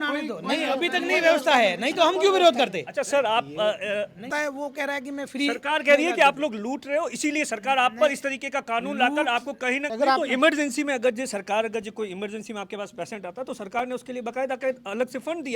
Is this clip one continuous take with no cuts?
no; 2 cuts; at 4.3 s, 9.9 s

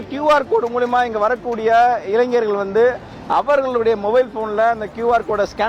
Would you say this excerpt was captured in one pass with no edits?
yes; 0 cuts

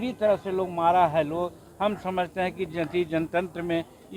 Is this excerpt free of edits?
yes; 0 cuts

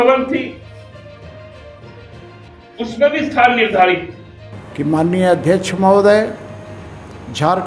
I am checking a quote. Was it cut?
no; 0 cuts

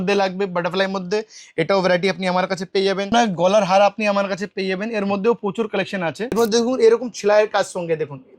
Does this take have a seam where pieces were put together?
yes; 2 cuts; at 3.1 s, 6.3 s

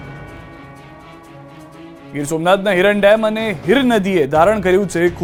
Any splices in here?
no; 0 cuts

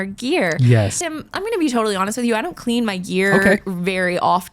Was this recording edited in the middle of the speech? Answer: yes; 1 cut; at 1.0 s

